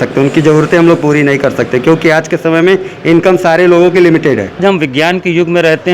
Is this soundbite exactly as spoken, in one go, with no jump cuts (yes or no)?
no